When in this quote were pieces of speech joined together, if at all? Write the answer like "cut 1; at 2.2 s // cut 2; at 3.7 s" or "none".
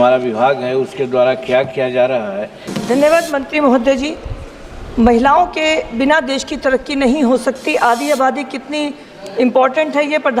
cut 1; at 2.6 s